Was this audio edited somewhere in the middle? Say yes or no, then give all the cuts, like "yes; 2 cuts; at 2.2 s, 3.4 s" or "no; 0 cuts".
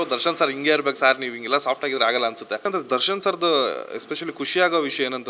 yes; 1 cut; at 2.7 s